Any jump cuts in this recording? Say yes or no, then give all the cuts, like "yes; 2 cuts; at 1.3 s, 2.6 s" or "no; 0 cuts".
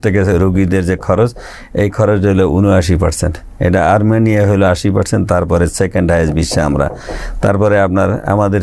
no; 0 cuts